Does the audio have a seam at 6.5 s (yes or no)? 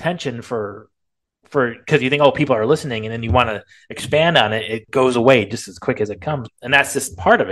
yes